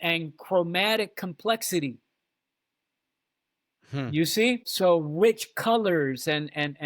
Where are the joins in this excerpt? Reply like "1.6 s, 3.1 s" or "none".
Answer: 4.7 s